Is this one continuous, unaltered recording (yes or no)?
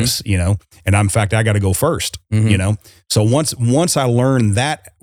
yes